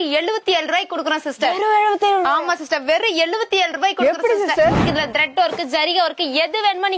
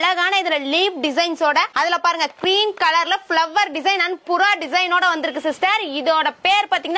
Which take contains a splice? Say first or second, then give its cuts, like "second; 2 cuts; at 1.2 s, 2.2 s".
first; 1 cut; at 4.8 s